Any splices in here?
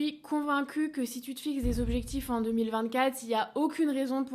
no; 0 cuts

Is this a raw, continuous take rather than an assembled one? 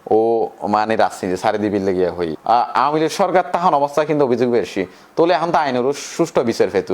no; 1 cut; at 2.3 s

